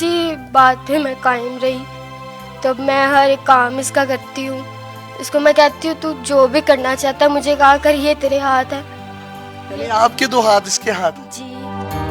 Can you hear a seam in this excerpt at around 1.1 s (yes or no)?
no